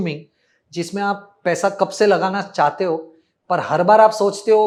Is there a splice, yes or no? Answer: no